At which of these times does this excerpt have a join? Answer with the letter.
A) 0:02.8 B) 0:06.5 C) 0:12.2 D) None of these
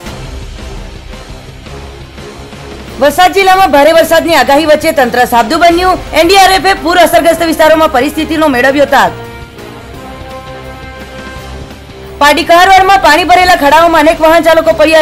A